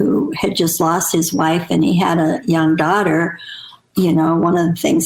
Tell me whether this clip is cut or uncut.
uncut